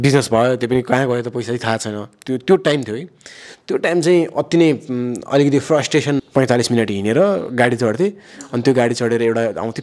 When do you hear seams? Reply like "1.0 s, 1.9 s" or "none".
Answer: 6.2 s